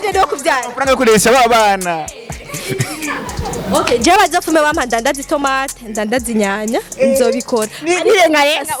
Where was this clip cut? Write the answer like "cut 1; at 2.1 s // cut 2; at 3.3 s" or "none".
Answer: none